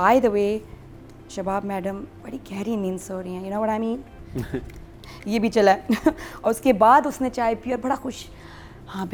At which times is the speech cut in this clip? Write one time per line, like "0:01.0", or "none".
none